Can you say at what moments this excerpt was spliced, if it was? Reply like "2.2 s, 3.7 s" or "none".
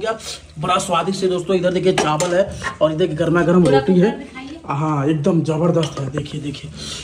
none